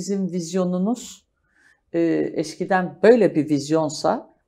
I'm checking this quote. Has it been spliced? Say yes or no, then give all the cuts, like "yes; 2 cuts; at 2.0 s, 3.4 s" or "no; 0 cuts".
no; 0 cuts